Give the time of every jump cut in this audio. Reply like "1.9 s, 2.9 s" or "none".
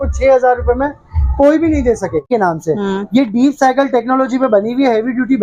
2.3 s